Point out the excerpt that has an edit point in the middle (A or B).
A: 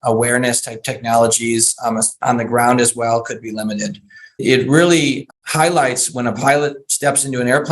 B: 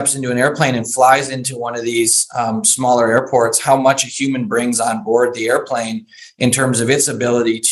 A